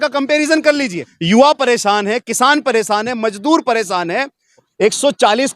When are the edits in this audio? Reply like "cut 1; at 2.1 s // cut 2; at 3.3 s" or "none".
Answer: cut 1; at 1.1 s // cut 2; at 4.7 s